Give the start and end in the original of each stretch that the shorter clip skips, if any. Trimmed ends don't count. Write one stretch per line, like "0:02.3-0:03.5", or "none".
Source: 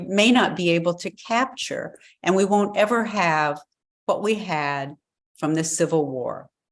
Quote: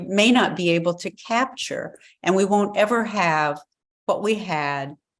none